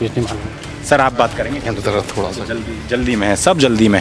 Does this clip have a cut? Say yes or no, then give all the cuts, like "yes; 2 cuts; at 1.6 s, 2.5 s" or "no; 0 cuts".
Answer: no; 0 cuts